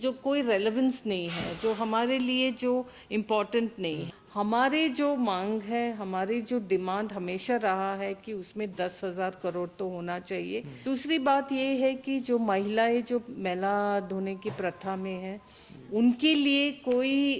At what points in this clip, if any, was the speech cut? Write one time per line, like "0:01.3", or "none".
0:04.1
0:10.7